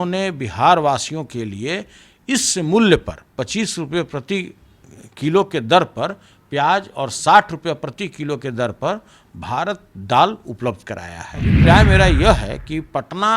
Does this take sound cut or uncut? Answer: cut